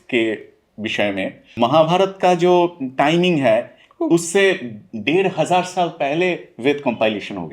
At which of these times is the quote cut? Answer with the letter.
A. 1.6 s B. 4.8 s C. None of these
A